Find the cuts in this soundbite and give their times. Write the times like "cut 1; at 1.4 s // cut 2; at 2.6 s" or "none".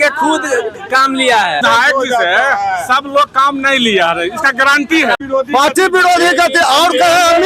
cut 1; at 1.6 s // cut 2; at 5.2 s